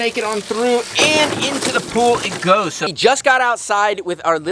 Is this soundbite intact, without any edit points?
no; 1 cut; at 2.9 s

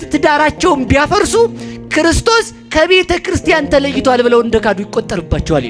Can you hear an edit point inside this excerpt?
no; 0 cuts

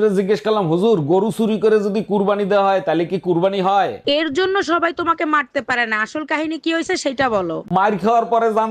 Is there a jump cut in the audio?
no; 0 cuts

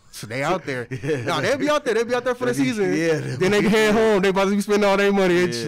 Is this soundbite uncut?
yes; 0 cuts

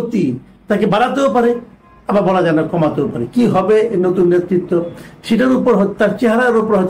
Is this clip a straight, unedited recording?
yes; 0 cuts

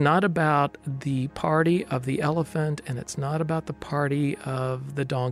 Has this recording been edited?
no; 0 cuts

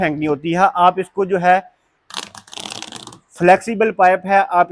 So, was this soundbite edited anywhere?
no; 0 cuts

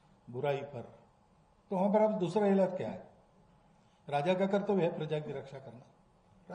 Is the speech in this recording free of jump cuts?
yes; 0 cuts

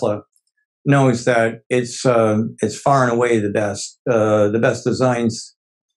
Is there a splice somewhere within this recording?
no; 0 cuts

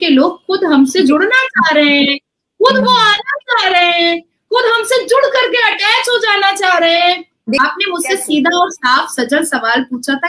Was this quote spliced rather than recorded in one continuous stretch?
no; 0 cuts

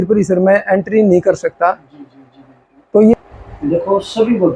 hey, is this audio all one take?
no; 1 cut; at 3.1 s

